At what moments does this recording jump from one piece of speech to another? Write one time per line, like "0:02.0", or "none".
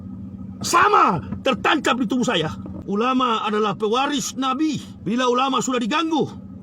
0:02.7
0:04.9